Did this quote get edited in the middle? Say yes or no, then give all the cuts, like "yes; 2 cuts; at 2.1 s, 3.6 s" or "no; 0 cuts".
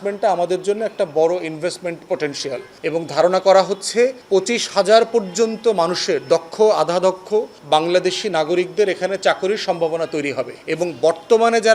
yes; 4 cuts; at 2.7 s, 4.2 s, 7.6 s, 10.6 s